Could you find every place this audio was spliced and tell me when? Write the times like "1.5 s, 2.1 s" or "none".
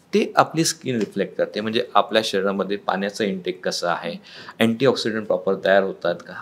none